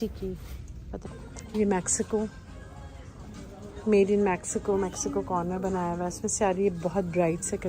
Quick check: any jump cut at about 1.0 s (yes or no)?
yes